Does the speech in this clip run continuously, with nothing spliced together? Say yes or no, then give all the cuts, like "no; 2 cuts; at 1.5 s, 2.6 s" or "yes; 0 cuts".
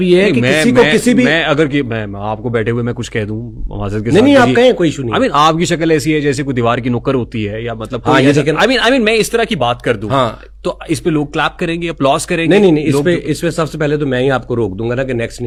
yes; 0 cuts